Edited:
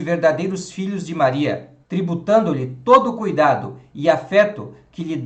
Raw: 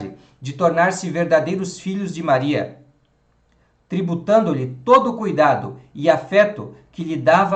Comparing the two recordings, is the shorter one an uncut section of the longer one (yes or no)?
no